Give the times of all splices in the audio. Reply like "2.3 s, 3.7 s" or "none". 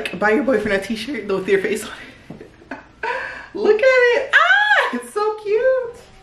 none